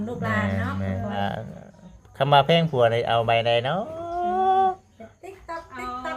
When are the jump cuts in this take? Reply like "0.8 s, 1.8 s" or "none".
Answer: 1.2 s